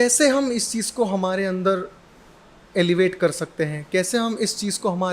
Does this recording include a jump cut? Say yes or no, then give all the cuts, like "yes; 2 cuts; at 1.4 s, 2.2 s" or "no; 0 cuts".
no; 0 cuts